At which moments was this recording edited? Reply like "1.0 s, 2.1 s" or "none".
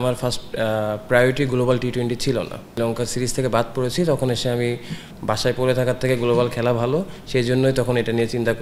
2.7 s, 5.1 s